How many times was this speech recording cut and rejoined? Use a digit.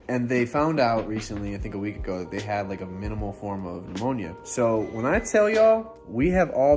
1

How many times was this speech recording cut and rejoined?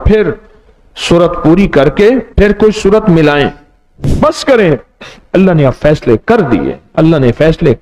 2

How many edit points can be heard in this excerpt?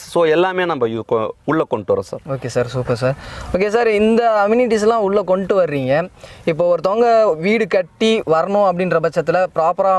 0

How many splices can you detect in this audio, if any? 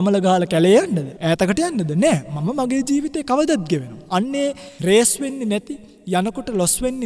2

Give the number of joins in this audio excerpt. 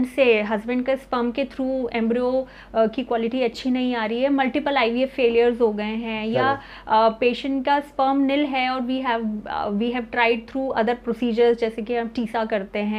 0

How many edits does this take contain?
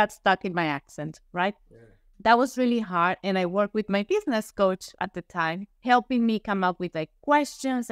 2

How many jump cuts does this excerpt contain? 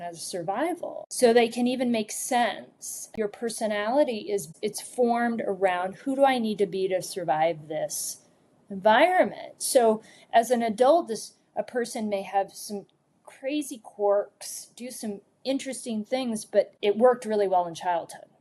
1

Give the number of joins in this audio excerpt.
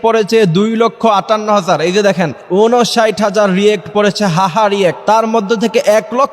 2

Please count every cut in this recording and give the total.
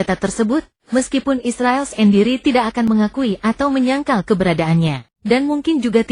1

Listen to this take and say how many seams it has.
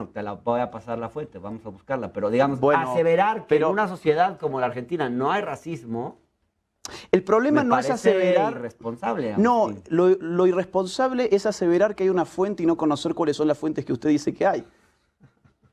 1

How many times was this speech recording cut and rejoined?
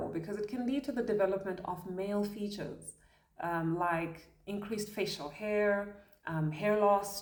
0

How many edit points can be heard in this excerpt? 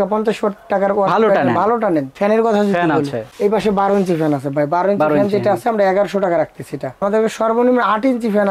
2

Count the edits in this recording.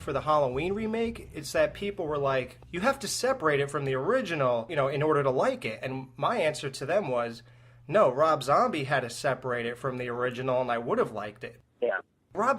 1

